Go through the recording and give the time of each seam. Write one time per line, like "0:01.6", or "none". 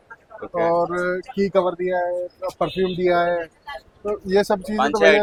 none